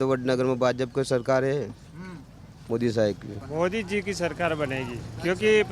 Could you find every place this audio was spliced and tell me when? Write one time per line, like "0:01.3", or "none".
0:03.4

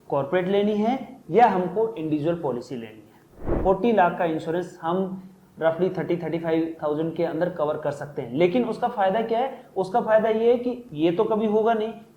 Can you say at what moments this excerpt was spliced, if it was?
0:03.5

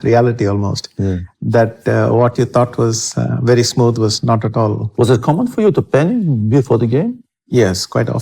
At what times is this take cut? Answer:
none

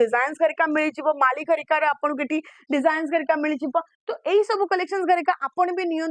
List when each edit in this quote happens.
none

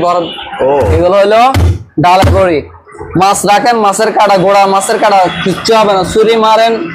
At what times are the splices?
0:00.9

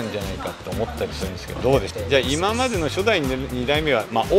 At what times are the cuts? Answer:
0:01.9

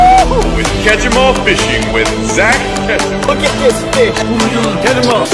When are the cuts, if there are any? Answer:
none

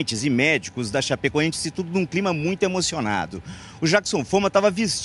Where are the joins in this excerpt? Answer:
0:01.9

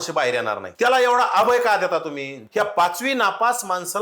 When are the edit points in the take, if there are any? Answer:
0:02.3

